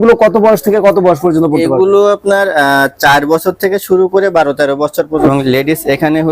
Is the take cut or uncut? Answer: cut